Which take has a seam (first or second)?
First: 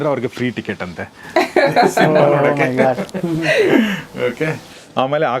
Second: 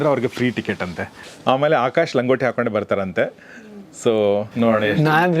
second